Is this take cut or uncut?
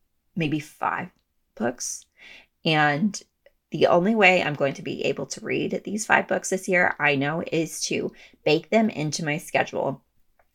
cut